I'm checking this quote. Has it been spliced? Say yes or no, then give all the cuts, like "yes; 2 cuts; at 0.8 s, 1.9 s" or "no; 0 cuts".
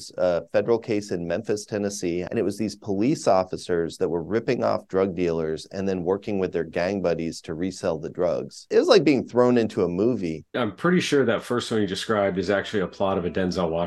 yes; 2 cuts; at 2.3 s, 10.4 s